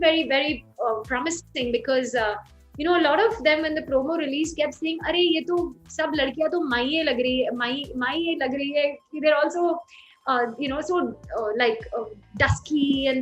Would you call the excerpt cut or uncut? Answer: uncut